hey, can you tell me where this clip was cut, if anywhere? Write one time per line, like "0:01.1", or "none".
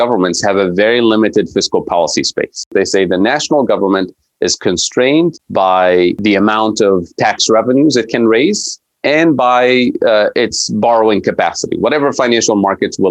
0:02.7
0:05.4
0:06.2